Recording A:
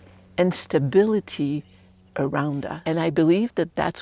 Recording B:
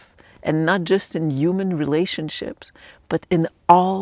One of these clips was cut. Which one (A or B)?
A